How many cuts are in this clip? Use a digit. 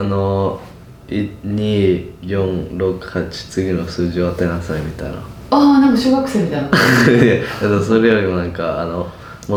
0